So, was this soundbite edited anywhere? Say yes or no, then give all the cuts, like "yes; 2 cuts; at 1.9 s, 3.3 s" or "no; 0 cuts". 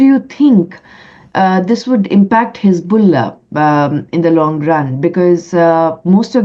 no; 0 cuts